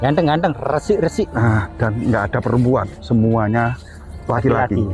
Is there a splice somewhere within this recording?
no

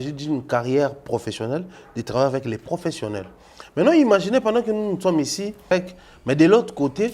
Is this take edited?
yes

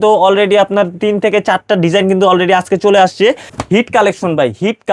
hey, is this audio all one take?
no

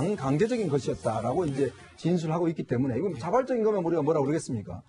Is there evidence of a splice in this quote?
yes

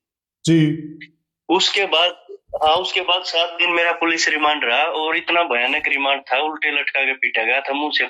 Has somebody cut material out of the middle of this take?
no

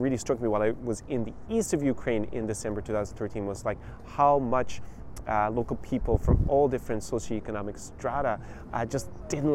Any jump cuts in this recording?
no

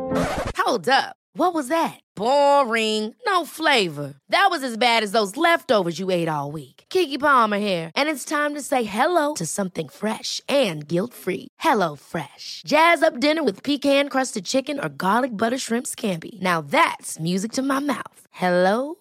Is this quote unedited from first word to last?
yes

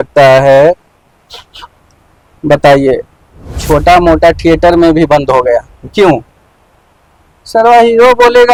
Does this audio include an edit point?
no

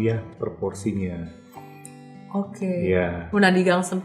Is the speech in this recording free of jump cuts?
yes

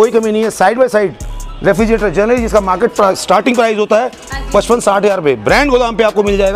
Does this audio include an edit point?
no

